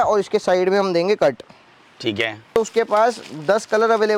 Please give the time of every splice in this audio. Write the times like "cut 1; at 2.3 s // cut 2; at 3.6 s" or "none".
cut 1; at 2.5 s